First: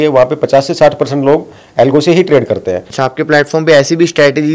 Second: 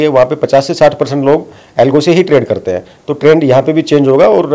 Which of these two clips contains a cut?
first; 1 cut; at 2.8 s

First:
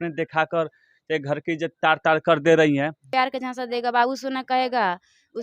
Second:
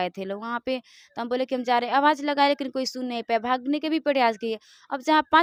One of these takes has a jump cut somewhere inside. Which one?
first; 1 cut; at 3.1 s

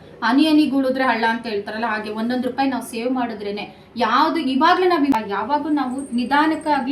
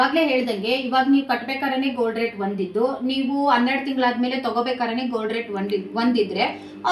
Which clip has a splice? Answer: first; 1 cut; at 5.1 s

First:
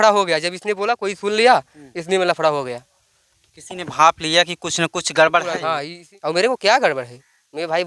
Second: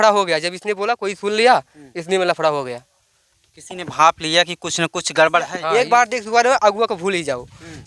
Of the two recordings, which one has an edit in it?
second; 1 cut; at 5.6 s

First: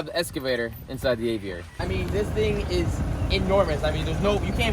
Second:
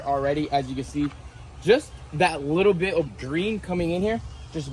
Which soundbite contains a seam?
first; 1 cut; at 1.7 s

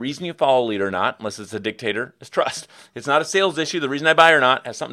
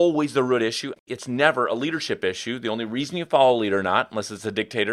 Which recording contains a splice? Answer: second; 1 cut; at 1.0 s

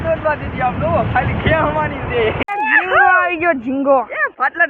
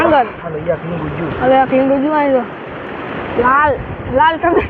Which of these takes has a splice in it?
first; 1 cut; at 2.4 s

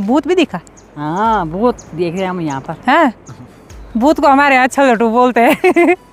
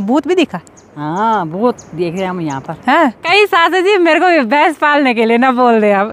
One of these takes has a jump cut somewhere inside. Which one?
second; 1 cut; at 3.2 s

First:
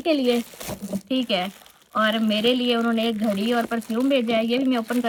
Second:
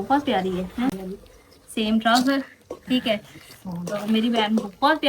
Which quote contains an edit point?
second; 1 cut; at 0.9 s

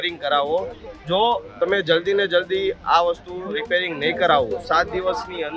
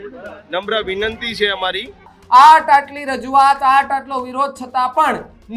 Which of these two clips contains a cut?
second; 1 cut; at 2.1 s

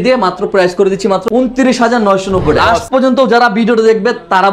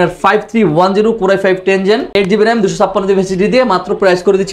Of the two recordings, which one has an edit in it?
first; 1 cut; at 2.8 s

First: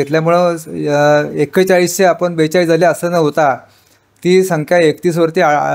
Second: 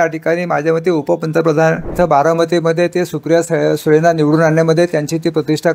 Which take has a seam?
second; 1 cut; at 1.9 s

